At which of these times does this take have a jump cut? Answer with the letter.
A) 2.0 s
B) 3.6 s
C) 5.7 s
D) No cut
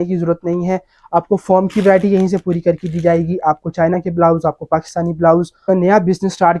C